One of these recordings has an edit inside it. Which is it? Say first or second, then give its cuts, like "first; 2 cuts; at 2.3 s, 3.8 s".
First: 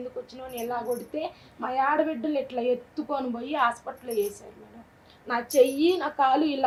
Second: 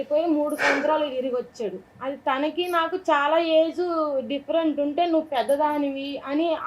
second; 1 cut; at 1.9 s